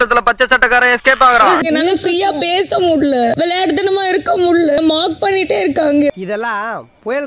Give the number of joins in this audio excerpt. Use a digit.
2